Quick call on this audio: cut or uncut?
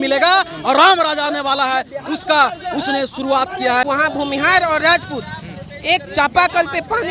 cut